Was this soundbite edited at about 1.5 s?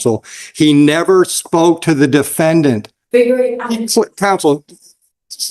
no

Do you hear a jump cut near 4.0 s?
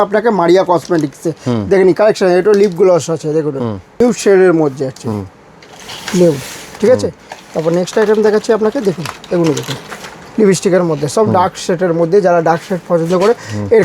yes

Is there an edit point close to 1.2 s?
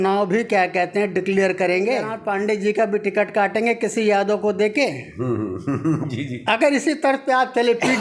no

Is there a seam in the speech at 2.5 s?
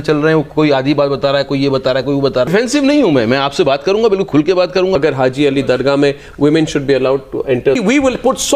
yes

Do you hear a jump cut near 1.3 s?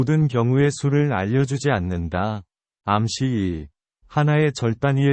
yes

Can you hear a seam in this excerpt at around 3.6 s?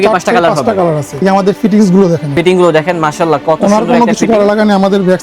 no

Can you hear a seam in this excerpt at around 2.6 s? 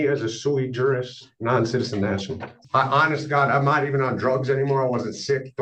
yes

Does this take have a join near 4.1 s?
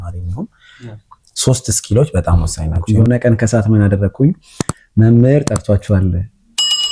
no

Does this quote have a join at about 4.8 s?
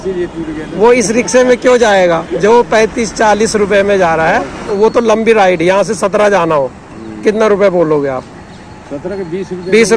yes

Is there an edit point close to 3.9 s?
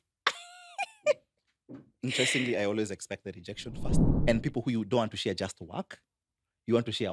yes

